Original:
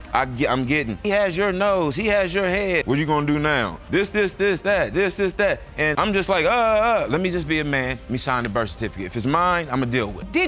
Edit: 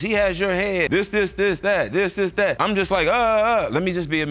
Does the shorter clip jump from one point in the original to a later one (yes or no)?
yes